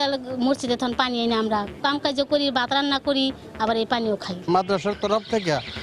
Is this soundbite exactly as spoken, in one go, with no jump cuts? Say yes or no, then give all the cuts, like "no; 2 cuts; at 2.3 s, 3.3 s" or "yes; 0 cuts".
no; 2 cuts; at 1.7 s, 4.4 s